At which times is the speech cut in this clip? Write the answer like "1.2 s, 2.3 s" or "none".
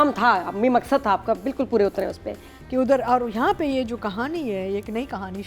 2.4 s